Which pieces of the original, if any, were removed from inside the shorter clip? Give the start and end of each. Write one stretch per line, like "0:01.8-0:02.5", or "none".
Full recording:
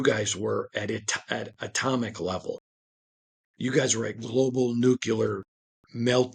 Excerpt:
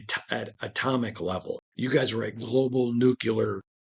0:02.7-0:03.5